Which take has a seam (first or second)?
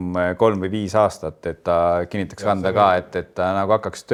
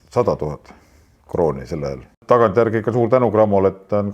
second